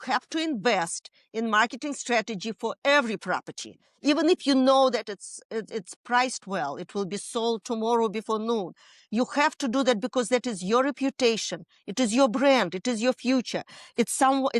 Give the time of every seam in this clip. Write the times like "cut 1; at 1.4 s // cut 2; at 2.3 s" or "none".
none